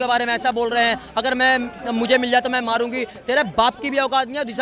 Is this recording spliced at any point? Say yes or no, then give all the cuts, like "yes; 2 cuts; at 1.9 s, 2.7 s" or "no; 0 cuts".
no; 0 cuts